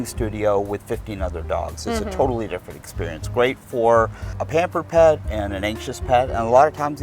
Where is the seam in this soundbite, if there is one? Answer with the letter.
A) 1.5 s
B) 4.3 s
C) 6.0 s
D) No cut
B